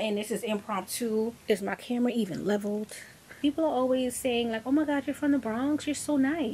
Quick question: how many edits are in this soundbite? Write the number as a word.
one